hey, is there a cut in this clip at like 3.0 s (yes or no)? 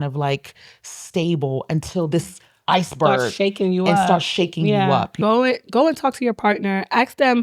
no